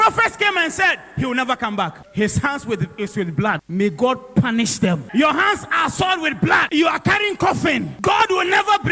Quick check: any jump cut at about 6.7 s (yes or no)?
yes